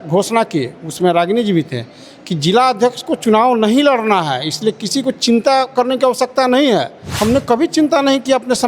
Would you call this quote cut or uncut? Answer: cut